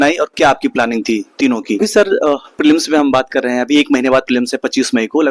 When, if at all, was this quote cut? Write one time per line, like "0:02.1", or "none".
0:01.8